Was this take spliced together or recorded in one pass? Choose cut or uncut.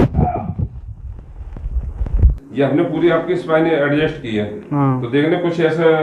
uncut